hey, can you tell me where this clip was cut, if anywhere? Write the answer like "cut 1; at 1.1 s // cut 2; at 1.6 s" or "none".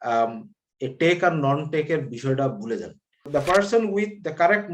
cut 1; at 3.3 s